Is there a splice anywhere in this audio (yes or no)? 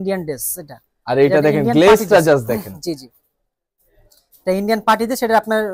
no